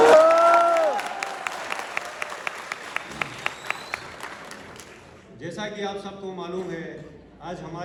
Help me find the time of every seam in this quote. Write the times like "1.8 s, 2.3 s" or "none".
none